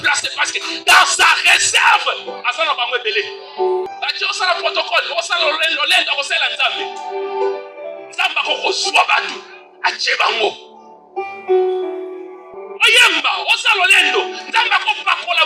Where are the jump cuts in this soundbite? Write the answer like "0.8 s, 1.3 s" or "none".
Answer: 3.9 s